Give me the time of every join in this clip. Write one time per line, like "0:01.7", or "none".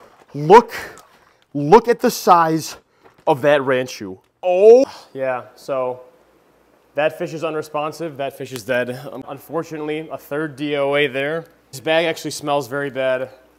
0:04.8
0:09.2
0:11.8